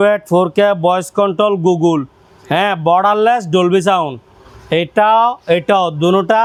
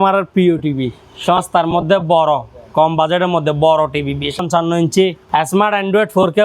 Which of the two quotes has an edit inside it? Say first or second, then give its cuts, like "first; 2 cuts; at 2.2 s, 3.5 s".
second; 2 cuts; at 4.4 s, 5.2 s